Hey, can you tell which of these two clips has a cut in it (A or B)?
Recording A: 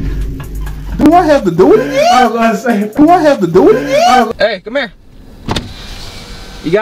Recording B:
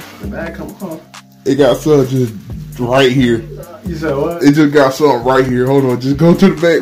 A